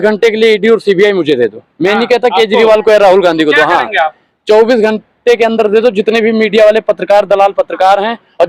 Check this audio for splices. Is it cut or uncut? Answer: uncut